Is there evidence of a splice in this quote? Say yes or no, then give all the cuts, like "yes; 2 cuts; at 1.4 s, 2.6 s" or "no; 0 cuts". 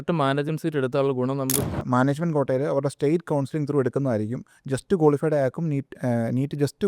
yes; 1 cut; at 1.6 s